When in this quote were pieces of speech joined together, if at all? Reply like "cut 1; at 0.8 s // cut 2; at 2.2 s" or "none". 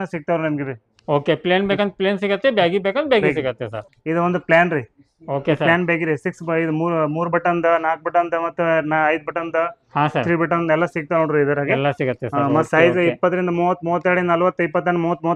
none

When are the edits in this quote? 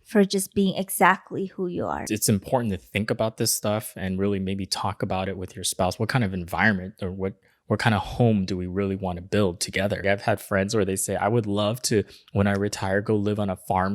cut 1; at 2.0 s // cut 2; at 10.0 s

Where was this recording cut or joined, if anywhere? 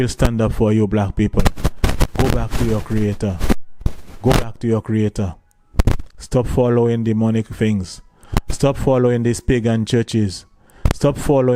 none

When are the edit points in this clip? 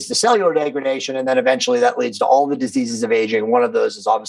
none

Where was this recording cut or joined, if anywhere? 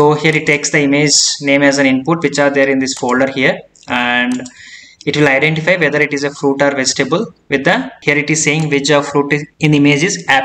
cut 1; at 7.9 s // cut 2; at 9.5 s

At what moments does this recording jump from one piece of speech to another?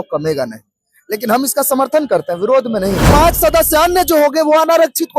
cut 1; at 3.1 s

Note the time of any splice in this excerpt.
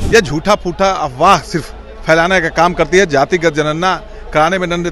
none

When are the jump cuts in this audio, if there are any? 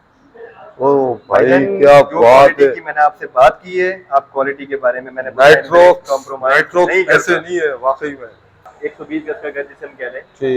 cut 1; at 8.7 s

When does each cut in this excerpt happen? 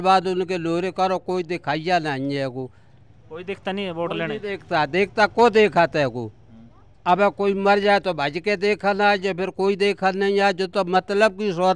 none

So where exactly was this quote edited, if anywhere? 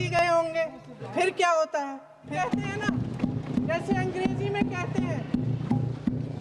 cut 1; at 2.3 s

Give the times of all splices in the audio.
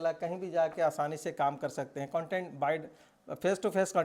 none

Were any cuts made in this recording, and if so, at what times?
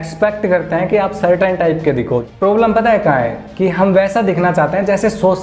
cut 1; at 2.2 s

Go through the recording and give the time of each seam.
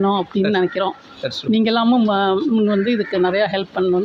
none

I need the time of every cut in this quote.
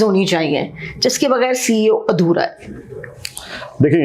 none

